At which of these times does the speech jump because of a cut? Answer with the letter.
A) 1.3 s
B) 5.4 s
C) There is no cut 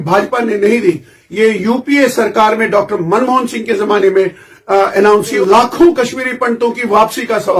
B